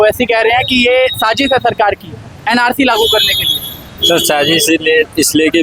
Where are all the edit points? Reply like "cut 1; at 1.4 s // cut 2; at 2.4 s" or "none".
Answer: none